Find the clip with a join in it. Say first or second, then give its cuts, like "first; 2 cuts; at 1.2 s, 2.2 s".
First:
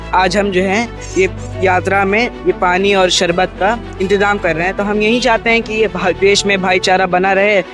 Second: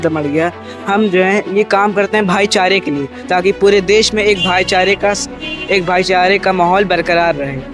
first; 1 cut; at 4.0 s